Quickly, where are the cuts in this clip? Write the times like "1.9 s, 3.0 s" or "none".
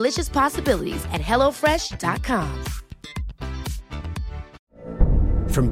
4.6 s